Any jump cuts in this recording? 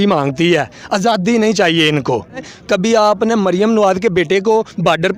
yes; 1 cut; at 2.5 s

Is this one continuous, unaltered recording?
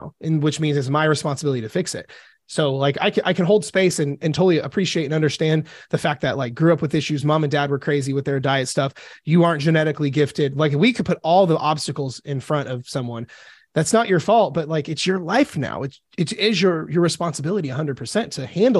yes; 0 cuts

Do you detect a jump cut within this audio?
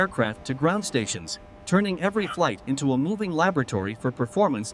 no; 0 cuts

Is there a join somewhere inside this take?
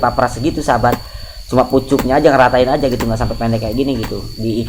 no; 0 cuts

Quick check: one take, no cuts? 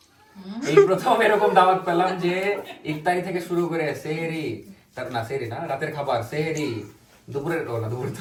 yes; 0 cuts

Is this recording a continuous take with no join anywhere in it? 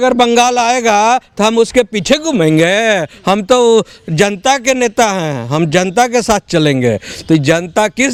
yes; 0 cuts

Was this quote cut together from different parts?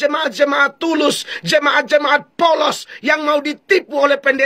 no; 0 cuts

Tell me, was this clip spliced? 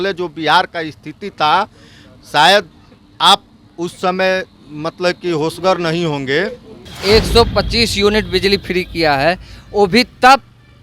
yes; 1 cut; at 6.9 s

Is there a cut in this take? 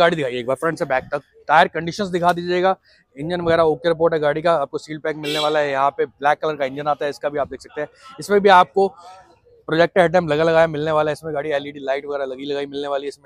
no; 0 cuts

